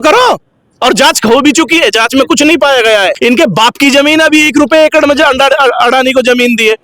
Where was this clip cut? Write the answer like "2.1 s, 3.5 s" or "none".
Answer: 3.1 s